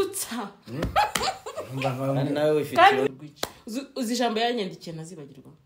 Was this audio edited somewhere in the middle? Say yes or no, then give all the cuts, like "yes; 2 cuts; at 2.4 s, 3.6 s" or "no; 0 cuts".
yes; 1 cut; at 3.1 s